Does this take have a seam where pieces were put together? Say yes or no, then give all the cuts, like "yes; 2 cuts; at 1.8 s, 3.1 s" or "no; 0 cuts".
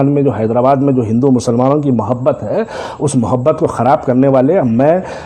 no; 0 cuts